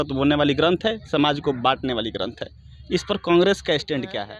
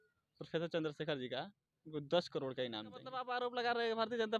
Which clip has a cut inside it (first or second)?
second